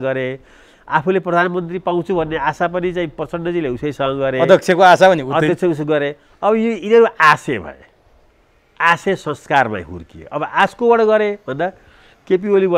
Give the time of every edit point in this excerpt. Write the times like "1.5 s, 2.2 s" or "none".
none